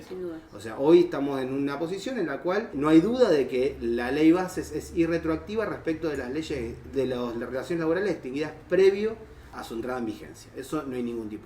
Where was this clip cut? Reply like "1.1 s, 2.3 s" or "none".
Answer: 2.7 s, 9.5 s